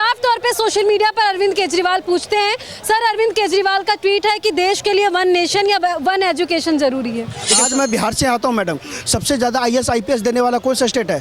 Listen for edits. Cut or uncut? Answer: cut